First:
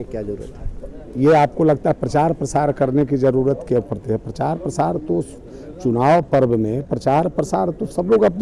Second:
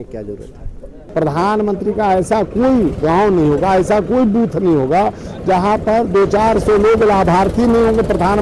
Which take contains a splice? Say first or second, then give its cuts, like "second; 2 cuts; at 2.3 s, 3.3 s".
second; 1 cut; at 1.0 s